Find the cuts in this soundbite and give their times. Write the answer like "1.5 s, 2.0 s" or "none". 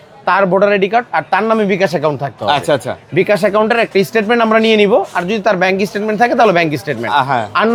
none